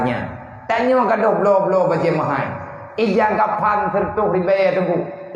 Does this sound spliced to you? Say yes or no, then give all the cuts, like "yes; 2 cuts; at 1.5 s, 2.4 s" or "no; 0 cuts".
no; 0 cuts